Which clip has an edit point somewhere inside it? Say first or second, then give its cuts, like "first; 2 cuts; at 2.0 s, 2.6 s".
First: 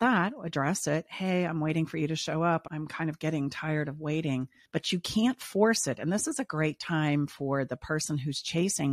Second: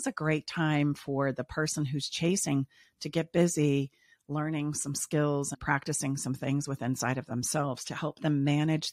first; 1 cut; at 4.6 s